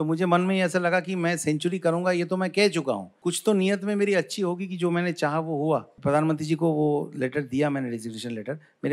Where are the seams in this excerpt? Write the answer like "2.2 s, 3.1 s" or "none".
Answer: 3.1 s, 5.9 s